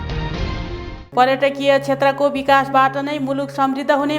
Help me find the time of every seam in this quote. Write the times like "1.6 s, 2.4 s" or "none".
1.0 s